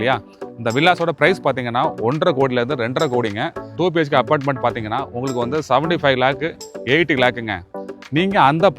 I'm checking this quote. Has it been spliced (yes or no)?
yes